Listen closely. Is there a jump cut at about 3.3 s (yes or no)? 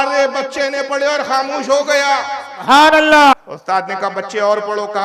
yes